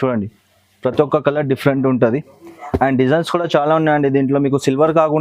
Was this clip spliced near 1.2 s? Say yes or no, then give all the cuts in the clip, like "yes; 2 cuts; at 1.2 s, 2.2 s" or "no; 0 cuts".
no; 0 cuts